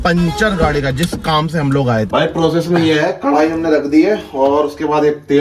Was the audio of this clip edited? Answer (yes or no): yes